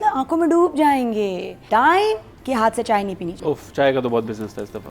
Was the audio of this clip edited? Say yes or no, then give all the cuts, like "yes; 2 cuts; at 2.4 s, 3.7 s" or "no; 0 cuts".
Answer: yes; 3 cuts; at 1.6 s, 2.3 s, 3.3 s